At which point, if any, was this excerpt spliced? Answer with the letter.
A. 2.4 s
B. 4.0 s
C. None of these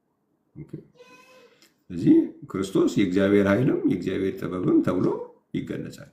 C